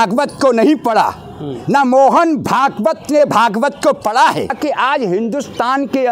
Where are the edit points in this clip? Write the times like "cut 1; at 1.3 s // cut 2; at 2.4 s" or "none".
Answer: cut 1; at 4.6 s